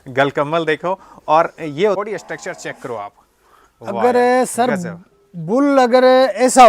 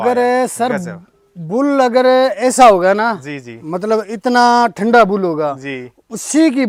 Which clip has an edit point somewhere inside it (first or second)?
first